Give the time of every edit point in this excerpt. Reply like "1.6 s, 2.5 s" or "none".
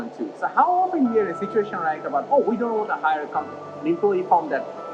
none